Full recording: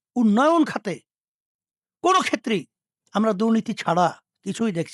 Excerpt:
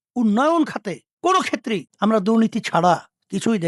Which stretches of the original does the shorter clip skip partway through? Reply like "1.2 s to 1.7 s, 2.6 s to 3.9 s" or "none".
1.0 s to 1.8 s, 2.7 s to 3.0 s